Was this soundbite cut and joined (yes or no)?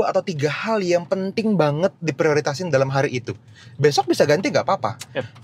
no